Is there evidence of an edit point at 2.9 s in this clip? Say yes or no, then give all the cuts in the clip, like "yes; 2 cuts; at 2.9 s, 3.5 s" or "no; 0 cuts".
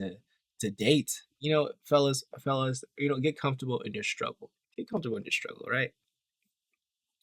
no; 1 cut; at 1.2 s